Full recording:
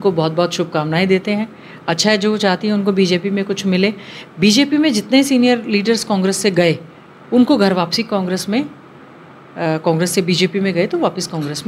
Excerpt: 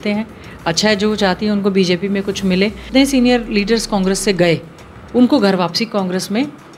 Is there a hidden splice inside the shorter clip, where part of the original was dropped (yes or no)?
yes